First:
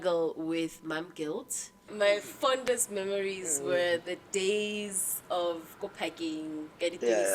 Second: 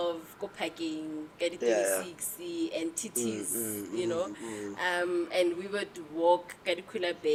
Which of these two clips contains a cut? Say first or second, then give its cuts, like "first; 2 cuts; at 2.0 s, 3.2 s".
first; 1 cut; at 1.9 s